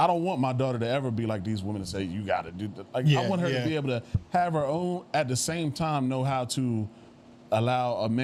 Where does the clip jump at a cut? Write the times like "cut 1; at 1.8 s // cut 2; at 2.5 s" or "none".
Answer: none